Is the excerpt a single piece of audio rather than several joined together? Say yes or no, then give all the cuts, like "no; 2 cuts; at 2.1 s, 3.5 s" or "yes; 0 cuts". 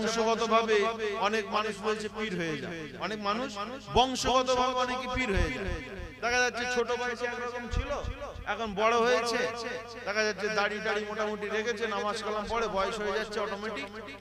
yes; 0 cuts